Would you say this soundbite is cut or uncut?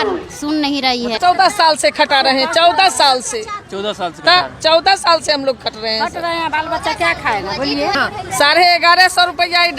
cut